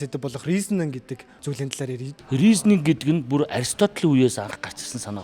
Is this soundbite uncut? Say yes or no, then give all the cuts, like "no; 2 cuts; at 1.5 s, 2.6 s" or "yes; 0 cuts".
no; 1 cut; at 1.7 s